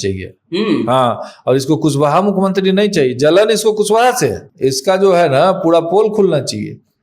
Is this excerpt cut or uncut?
cut